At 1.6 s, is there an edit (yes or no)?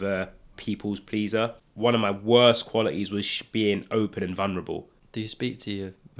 yes